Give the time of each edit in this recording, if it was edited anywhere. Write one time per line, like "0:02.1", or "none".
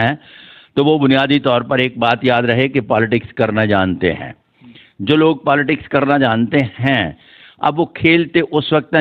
none